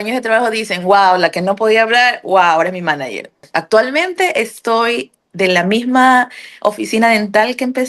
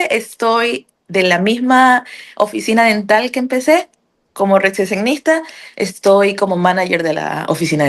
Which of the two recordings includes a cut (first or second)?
first